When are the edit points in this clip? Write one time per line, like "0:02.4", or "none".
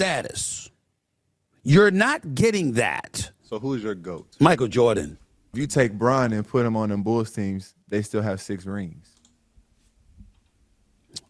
0:05.6